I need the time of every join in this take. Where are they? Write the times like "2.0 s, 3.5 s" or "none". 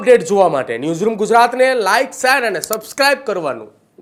none